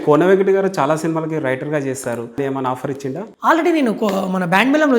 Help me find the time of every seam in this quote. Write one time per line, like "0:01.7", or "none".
0:02.4

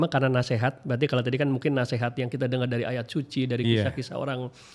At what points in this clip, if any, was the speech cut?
none

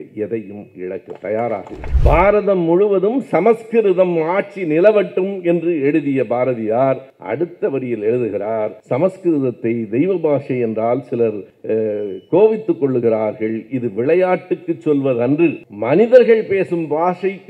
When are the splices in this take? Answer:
0:01.9

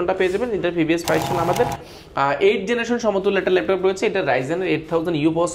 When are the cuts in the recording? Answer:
0:01.9

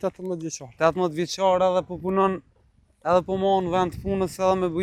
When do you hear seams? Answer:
none

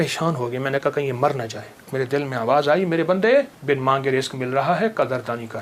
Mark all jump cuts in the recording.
0:01.9
0:03.6

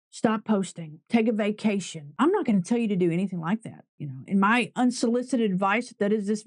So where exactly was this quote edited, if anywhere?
0:02.0

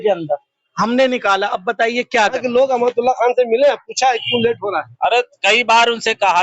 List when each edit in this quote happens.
0:02.2

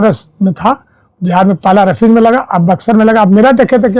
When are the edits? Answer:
none

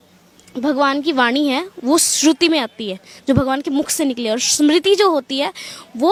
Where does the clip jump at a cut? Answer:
none

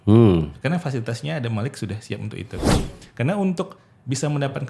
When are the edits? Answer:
0:02.7

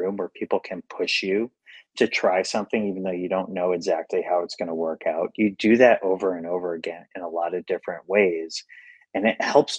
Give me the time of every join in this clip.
none

